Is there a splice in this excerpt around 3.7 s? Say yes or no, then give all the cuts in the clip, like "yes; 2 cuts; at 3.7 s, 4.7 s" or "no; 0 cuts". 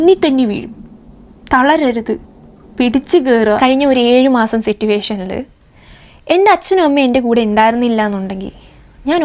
yes; 1 cut; at 3.7 s